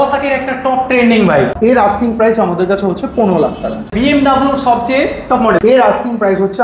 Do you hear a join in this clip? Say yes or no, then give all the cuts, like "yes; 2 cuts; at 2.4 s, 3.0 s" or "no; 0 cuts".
yes; 3 cuts; at 1.5 s, 3.9 s, 5.6 s